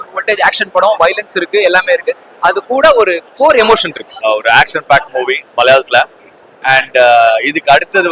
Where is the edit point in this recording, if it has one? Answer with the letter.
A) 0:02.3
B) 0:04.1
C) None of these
B